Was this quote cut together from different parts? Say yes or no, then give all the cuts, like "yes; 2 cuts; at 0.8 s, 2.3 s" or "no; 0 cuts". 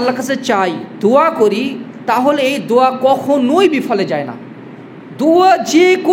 no; 0 cuts